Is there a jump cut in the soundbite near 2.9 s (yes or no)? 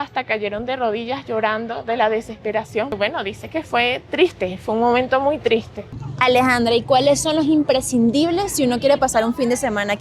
yes